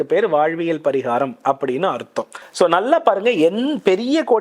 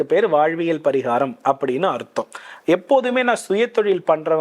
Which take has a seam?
first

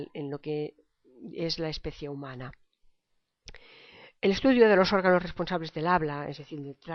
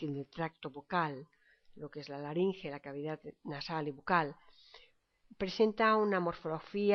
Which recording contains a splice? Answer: second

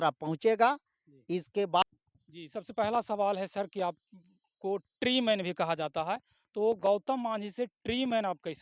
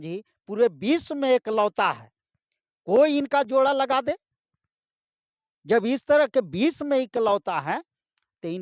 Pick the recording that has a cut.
first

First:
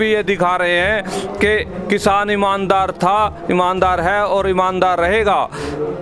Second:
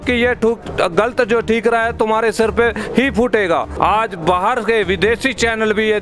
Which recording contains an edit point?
second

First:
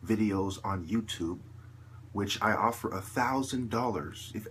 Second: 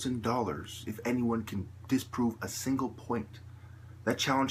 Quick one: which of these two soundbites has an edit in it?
second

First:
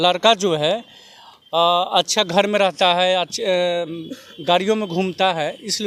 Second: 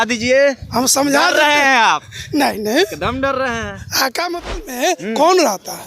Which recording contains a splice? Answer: second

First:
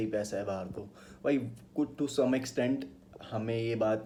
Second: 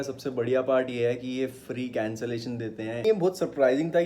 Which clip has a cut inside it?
second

